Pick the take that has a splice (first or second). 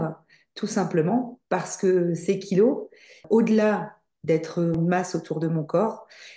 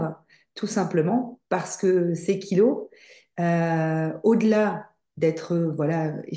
first